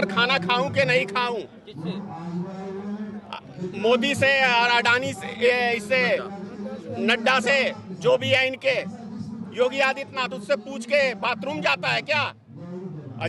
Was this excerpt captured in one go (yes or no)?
yes